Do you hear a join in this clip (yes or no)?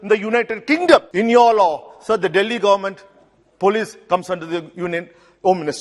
yes